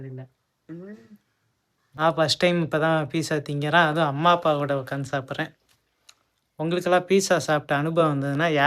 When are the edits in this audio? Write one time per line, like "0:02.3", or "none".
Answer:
0:02.0